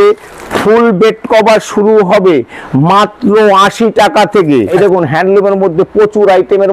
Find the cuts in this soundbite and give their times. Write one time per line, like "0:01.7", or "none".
0:04.7